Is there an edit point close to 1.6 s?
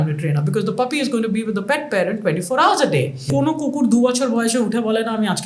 no; 1 cut; at 3.3 s

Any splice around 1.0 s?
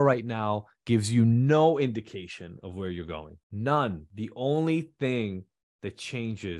no; 2 cuts; at 3.4 s, 4.1 s

